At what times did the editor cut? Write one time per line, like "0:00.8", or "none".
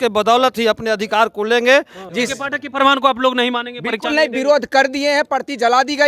0:02.0